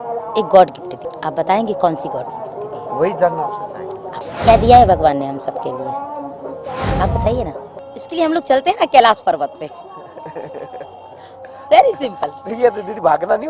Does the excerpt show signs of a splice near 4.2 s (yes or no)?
yes